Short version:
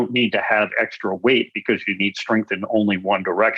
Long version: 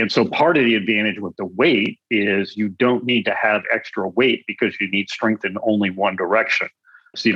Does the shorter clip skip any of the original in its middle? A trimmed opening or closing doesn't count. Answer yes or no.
no